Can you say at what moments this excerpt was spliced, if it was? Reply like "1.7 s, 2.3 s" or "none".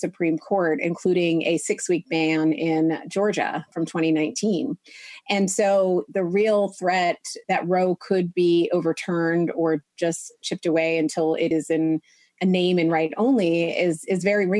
11.5 s